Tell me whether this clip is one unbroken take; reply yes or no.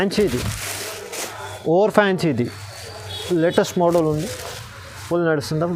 yes